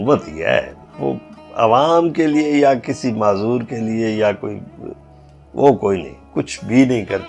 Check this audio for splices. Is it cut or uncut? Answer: uncut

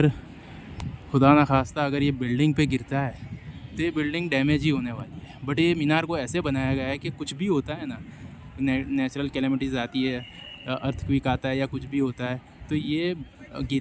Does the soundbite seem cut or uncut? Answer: uncut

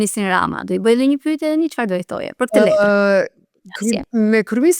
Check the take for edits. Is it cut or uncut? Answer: uncut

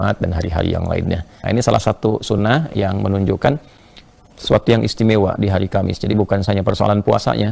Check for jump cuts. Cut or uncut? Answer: cut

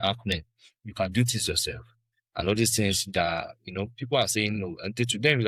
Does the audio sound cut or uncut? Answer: uncut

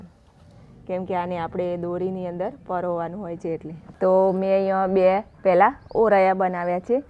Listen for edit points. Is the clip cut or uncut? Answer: cut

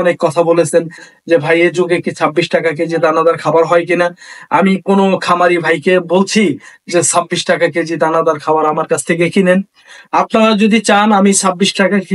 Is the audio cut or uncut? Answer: uncut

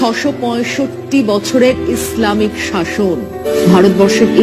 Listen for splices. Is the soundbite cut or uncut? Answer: cut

